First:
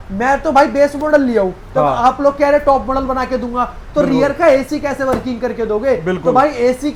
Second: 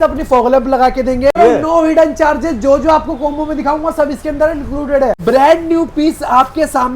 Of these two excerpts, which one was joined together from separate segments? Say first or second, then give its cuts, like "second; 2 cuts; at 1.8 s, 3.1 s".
second; 2 cuts; at 1.3 s, 5.2 s